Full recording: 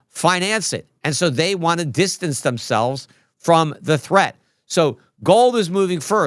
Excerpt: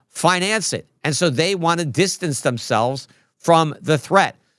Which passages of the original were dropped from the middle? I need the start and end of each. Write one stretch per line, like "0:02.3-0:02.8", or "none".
none

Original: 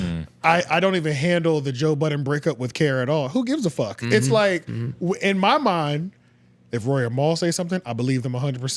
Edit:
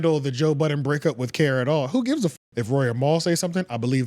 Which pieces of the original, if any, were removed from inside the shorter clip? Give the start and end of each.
0:03.7-0:06.5

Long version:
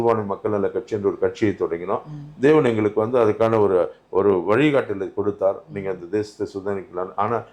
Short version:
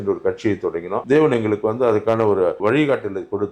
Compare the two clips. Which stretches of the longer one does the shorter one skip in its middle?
0:02.0-0:02.4
0:03.9-0:04.4

